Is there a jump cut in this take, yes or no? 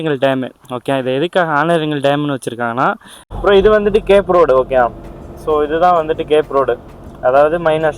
yes